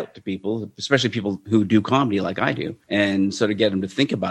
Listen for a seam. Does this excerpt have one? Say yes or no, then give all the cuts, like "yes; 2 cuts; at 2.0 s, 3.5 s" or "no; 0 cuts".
yes; 2 cuts; at 1.4 s, 2.7 s